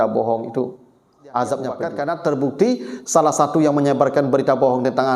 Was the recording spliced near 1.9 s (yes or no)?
yes